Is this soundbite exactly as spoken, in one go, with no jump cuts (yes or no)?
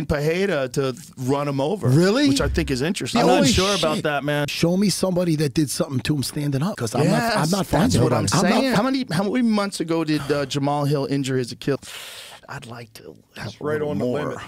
no